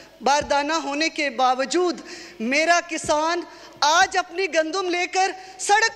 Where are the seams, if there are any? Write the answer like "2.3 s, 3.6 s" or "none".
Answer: none

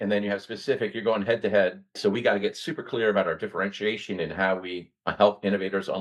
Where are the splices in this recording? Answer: 2.0 s

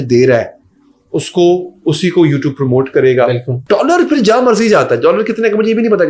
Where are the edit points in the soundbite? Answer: 3.5 s

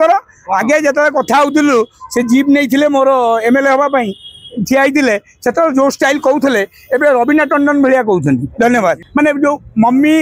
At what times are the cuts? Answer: 9.0 s

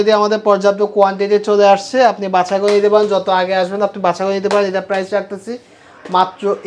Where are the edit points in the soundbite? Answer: none

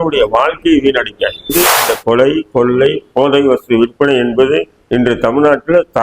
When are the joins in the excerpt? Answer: 1.5 s

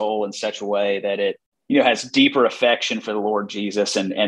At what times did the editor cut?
1.5 s

